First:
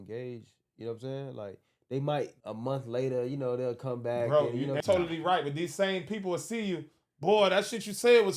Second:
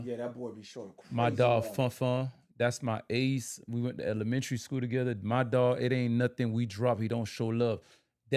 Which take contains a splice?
first; 2 cuts; at 2.4 s, 4.8 s

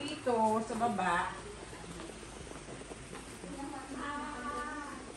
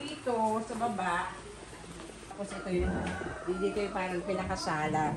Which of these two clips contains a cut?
second; 1 cut; at 2.3 s

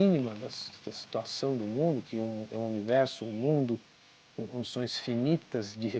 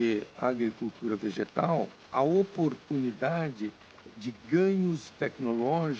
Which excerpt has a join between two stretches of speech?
second; 1 cut; at 2.0 s

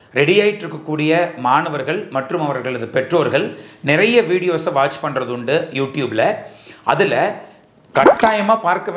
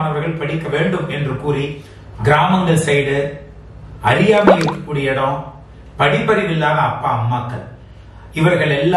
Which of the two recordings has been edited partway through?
second; 1 cut; at 1.9 s

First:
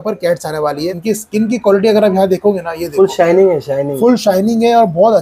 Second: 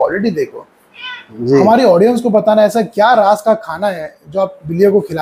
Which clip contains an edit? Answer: first; 1 cut; at 0.9 s

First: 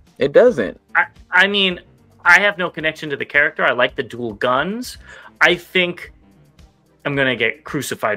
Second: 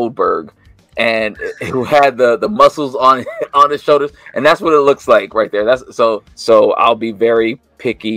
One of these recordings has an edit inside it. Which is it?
second; 1 cut; at 6.3 s

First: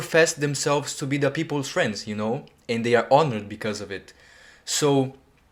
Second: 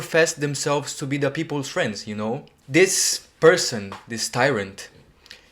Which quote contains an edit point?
second; 1 cut; at 2.5 s

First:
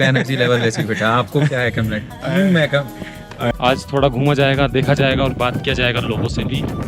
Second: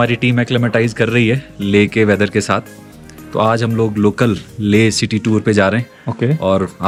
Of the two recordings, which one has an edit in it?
first; 1 cut; at 3.5 s

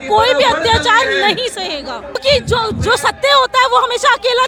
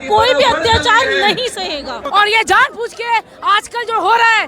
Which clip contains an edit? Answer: second; 1 cut; at 2.0 s

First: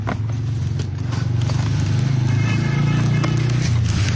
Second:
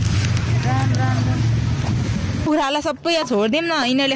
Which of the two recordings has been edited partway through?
second; 1 cut; at 2.5 s

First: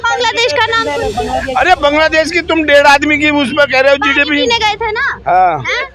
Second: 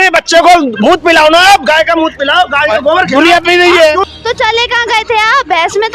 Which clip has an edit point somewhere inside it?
second; 1 cut; at 4.1 s

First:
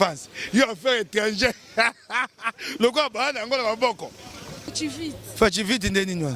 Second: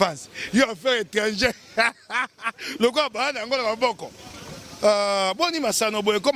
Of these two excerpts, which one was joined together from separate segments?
first; 1 cut; at 4.7 s

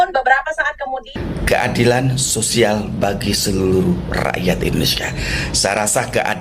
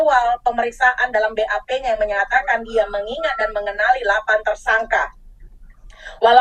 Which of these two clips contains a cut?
first; 1 cut; at 1.1 s

